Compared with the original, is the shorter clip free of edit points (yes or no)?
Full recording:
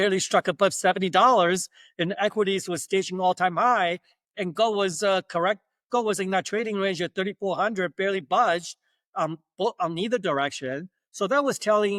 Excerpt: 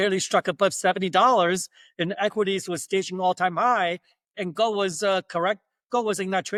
yes